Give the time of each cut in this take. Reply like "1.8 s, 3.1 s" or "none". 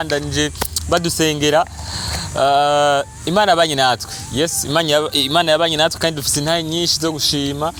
none